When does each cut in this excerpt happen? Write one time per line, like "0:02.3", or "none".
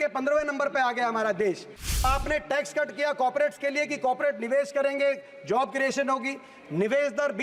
0:02.0